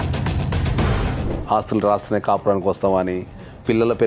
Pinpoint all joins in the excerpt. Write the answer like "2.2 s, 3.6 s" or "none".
1.2 s